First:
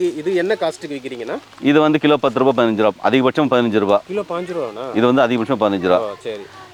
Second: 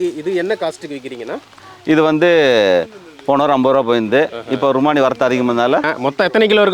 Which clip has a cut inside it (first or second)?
second